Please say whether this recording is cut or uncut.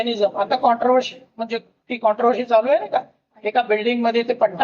uncut